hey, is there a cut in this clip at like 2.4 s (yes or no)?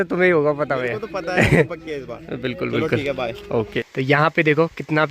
no